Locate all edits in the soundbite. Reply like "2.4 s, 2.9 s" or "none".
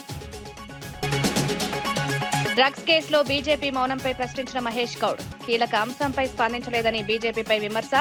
none